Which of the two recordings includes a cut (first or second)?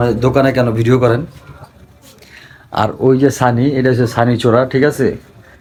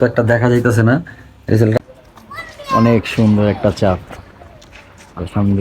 second